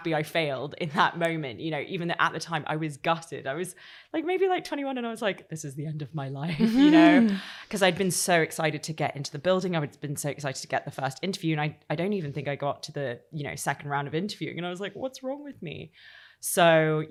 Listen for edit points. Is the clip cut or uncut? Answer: uncut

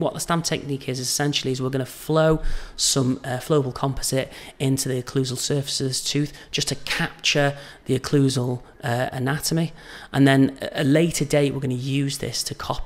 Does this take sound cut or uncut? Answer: uncut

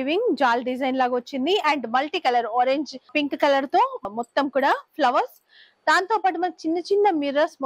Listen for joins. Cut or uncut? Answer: uncut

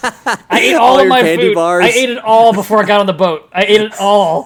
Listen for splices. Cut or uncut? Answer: uncut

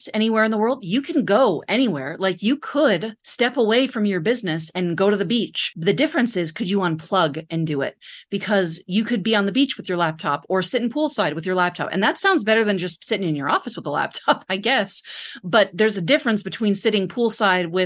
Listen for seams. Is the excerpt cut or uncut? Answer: cut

